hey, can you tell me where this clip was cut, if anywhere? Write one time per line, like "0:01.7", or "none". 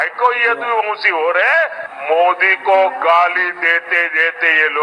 0:01.9